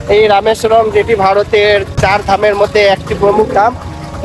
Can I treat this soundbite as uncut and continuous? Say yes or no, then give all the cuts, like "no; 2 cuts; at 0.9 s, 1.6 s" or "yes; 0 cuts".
no; 1 cut; at 2.0 s